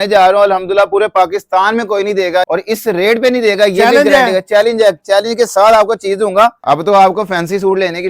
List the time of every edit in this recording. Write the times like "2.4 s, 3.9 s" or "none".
2.4 s, 6.6 s